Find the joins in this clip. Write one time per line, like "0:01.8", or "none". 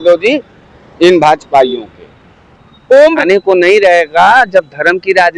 0:03.2